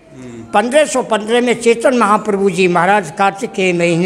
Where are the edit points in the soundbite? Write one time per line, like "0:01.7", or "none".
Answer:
none